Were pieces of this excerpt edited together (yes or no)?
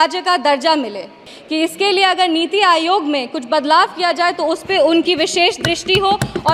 yes